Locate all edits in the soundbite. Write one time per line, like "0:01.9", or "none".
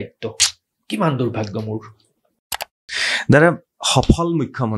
0:02.8